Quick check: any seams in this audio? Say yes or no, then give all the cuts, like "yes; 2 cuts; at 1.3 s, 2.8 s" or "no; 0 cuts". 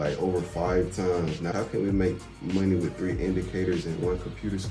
yes; 1 cut; at 1.5 s